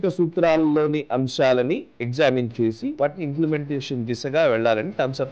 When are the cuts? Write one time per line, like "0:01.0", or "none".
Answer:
none